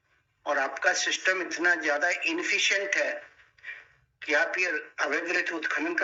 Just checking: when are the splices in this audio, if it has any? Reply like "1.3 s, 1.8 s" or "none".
none